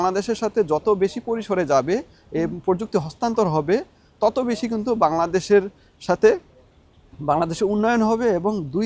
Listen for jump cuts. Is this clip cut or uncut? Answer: uncut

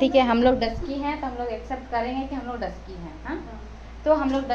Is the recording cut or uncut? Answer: uncut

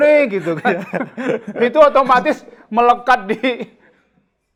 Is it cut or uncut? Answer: uncut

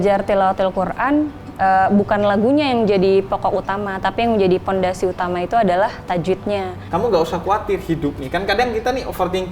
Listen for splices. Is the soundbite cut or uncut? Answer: cut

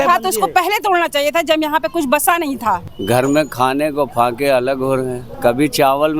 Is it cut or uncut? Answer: cut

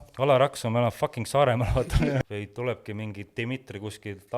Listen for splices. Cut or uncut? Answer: cut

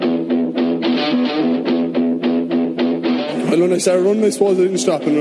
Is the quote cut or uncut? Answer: uncut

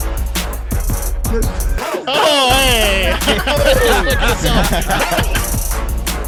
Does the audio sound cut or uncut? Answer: uncut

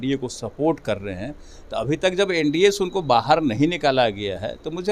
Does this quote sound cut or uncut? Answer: uncut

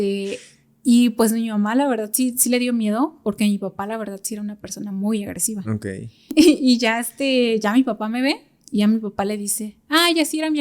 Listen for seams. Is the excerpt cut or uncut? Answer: cut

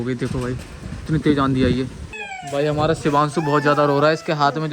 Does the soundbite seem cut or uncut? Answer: cut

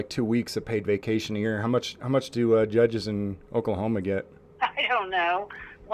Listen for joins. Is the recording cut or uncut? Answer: cut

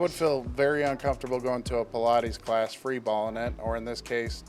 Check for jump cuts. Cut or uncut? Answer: uncut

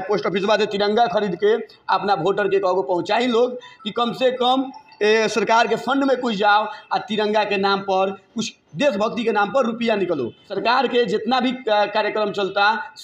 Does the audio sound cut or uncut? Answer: cut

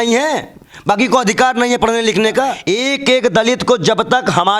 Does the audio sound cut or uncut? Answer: cut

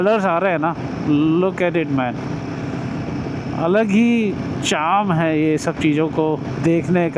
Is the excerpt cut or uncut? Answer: uncut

